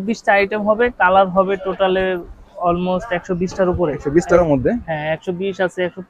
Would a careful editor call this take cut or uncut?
cut